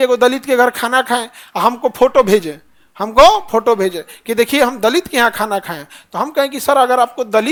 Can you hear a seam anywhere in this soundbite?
no; 0 cuts

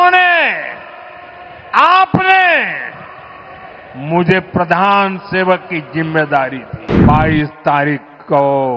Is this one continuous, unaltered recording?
no; 1 cut; at 6.9 s

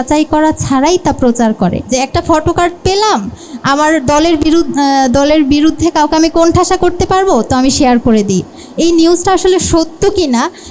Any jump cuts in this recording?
yes; 1 cut; at 1.9 s

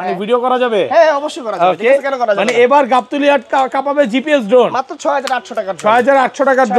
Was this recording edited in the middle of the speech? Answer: no; 0 cuts

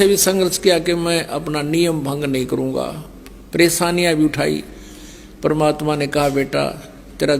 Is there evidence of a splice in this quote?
no; 0 cuts

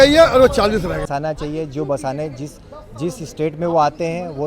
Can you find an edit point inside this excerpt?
yes; 1 cut; at 1.1 s

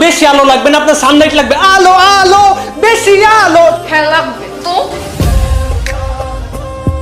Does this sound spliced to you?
no; 0 cuts

